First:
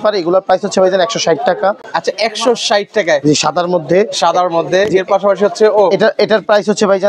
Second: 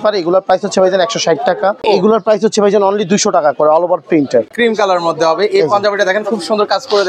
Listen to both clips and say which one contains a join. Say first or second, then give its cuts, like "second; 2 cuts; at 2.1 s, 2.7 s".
second; 2 cuts; at 1.8 s, 4.5 s